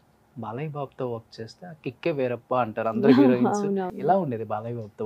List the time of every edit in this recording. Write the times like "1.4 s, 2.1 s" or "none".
3.9 s